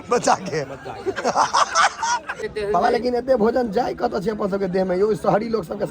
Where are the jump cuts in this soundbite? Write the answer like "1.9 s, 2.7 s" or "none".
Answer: 2.4 s